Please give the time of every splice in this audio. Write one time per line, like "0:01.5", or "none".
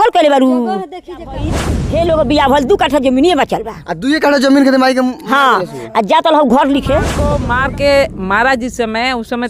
0:01.7
0:07.3

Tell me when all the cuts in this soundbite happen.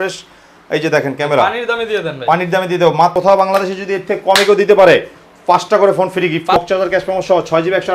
0:03.2
0:06.6

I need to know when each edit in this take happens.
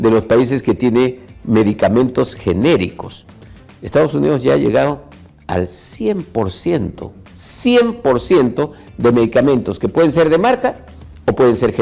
none

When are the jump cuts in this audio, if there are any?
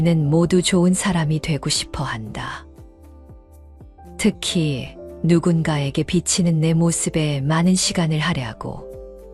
none

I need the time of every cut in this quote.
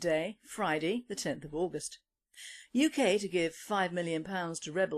0:03.8

